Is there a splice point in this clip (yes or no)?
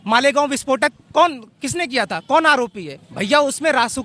no